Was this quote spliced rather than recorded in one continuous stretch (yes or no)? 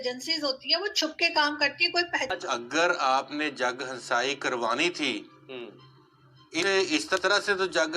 yes